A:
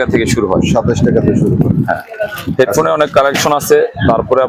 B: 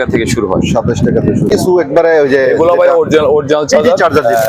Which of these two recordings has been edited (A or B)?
B